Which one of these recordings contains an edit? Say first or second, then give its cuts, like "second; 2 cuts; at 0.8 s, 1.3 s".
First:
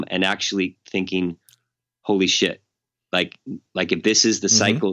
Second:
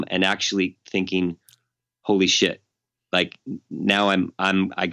first; 1 cut; at 3.6 s